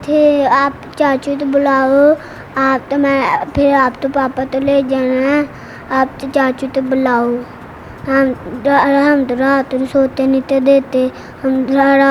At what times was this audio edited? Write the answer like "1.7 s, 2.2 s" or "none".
none